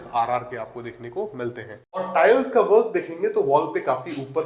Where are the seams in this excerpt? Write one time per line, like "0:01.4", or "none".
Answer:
0:02.0